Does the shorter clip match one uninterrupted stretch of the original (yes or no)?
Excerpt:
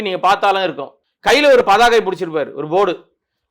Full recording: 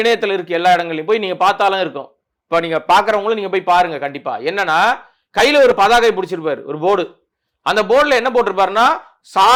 no